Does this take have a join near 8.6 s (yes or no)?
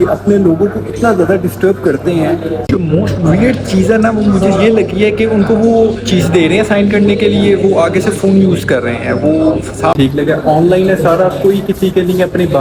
no